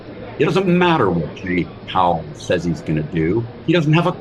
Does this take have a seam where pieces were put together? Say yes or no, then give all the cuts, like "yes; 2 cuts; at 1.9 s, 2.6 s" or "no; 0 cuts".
no; 0 cuts